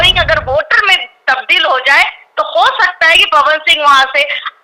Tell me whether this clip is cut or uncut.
uncut